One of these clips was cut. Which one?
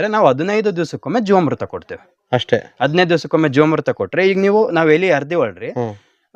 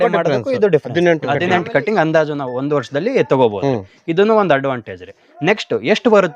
second; 1 cut; at 1.0 s

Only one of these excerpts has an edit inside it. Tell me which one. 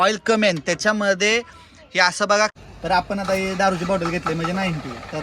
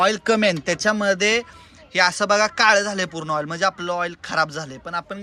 first; 1 cut; at 2.5 s

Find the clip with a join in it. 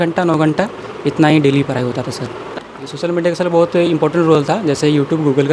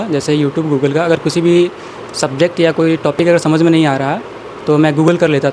first; 1 cut; at 2.5 s

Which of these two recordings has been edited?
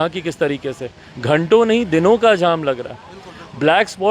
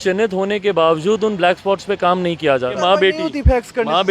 second; 1 cut; at 2.8 s

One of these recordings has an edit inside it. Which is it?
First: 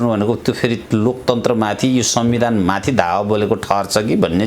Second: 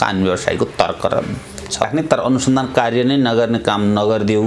second; 1 cut; at 1.9 s

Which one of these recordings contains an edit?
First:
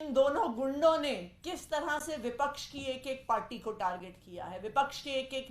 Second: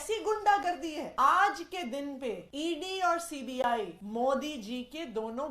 second; 3 cuts; at 1.1 s, 2.5 s, 4.0 s

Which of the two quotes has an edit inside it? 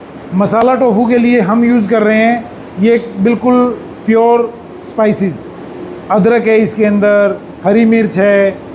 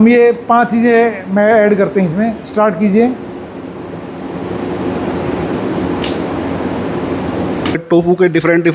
second; 1 cut; at 7.8 s

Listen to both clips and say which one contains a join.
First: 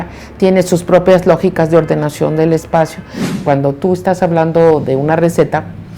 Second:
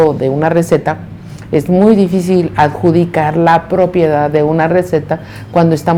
first; 1 cut; at 3.3 s

